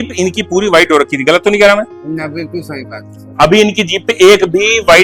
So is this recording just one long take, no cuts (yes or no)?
yes